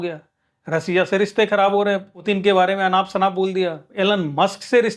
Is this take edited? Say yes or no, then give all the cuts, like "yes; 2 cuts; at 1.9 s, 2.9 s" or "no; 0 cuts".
yes; 2 cuts; at 2.1 s, 3.8 s